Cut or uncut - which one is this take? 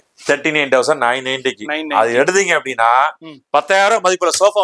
uncut